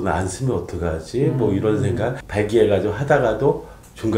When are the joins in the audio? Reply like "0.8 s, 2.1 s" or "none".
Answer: 2.2 s